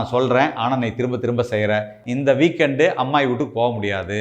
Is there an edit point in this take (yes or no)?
yes